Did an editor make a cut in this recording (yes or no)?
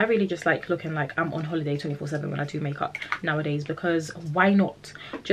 no